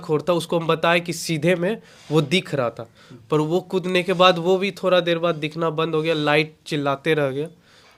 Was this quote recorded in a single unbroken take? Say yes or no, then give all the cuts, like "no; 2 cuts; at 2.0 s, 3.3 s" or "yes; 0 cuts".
yes; 0 cuts